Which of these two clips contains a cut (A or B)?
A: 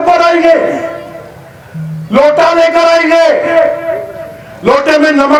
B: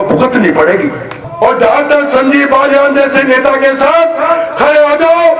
B